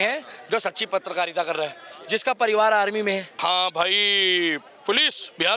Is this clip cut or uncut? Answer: cut